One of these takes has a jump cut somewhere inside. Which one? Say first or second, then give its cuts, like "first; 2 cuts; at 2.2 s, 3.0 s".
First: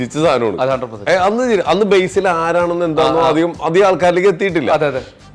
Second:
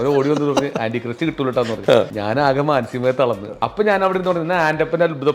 second; 2 cuts; at 2.2 s, 3.5 s